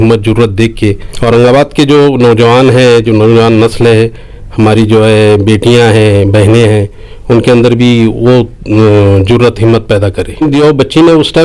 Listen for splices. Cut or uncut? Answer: cut